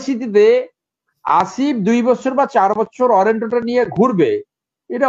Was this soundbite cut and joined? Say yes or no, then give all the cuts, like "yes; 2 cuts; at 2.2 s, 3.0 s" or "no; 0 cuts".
no; 0 cuts